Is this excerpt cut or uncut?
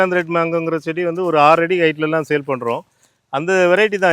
uncut